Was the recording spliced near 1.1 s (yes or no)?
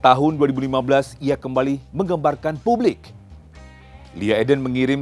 no